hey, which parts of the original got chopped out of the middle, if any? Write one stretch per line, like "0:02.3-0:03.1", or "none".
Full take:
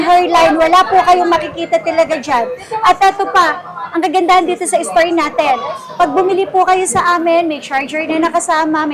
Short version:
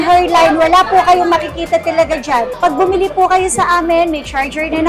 0:02.5-0:05.9